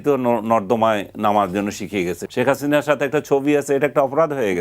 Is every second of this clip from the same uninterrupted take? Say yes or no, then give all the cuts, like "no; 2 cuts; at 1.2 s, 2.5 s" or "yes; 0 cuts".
no; 1 cut; at 2.2 s